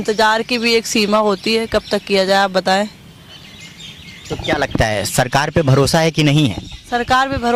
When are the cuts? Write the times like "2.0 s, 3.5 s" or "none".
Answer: none